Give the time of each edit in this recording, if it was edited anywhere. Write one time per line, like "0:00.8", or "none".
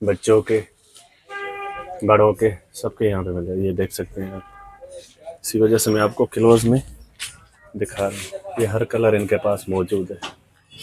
none